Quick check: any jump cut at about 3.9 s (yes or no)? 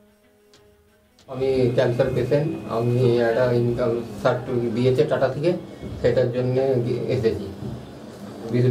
no